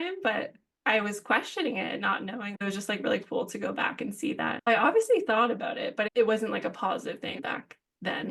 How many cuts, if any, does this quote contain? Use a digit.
3